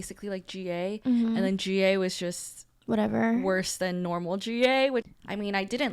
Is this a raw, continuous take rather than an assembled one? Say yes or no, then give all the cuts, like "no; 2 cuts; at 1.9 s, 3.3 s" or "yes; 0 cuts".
no; 1 cut; at 5.0 s